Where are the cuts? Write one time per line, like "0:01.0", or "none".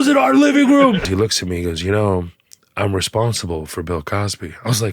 0:01.1

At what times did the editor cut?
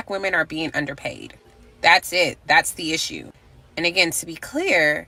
none

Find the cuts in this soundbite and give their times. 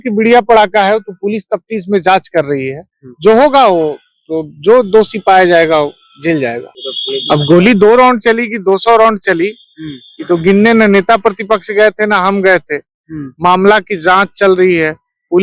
0:06.7

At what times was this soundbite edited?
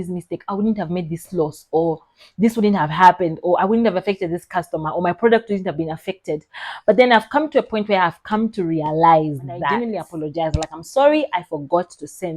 0:10.0

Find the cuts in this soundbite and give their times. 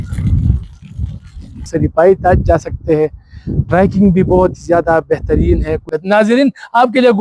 0:01.7
0:05.7

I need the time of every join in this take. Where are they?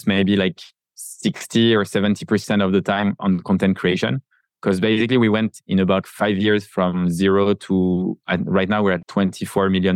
0:06.1
0:09.0

